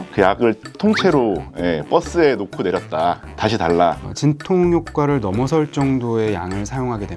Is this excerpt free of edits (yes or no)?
no